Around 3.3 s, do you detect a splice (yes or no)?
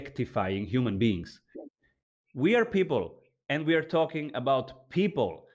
no